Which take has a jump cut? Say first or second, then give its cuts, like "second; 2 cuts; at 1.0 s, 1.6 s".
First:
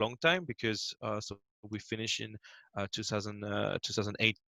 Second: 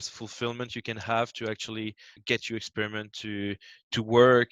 second; 1 cut; at 2.2 s